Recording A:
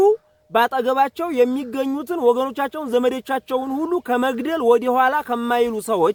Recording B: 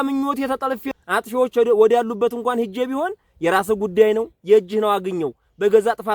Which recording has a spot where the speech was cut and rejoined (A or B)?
B